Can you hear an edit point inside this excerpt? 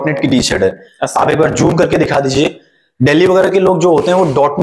no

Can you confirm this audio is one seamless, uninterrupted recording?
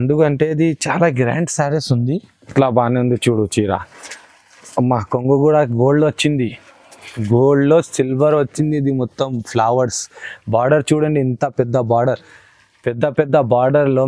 no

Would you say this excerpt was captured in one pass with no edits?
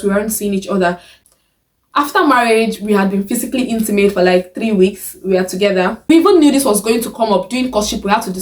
no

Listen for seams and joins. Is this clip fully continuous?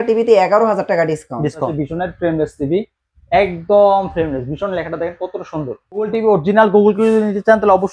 no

